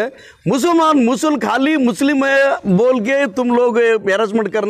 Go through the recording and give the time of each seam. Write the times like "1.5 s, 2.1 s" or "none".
none

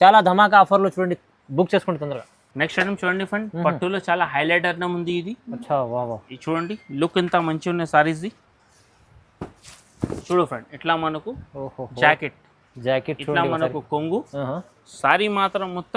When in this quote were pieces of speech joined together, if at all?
none

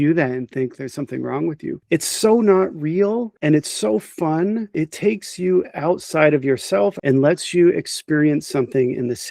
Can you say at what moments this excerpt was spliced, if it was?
3.3 s, 4.7 s, 7.0 s

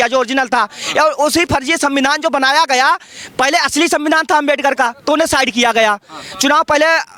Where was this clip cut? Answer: none

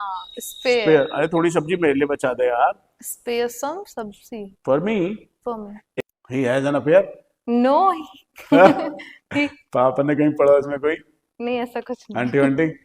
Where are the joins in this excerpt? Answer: 5.8 s

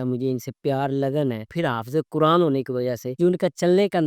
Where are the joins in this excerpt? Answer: 1.5 s, 3.1 s

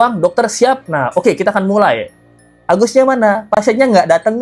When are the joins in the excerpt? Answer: none

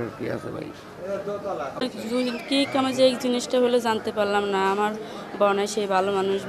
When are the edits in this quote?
1.7 s

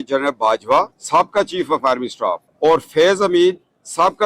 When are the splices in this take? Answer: 1.0 s, 2.5 s

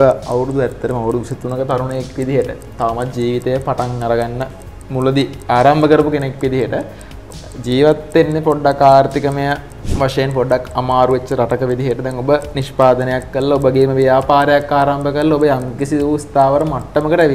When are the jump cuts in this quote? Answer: none

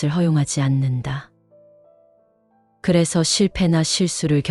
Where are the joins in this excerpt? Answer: 1.3 s, 2.7 s

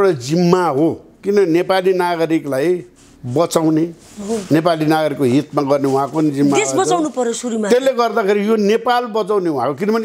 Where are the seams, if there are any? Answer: none

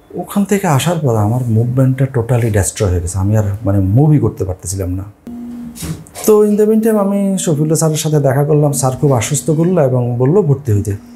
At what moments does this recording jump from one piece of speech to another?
5.2 s

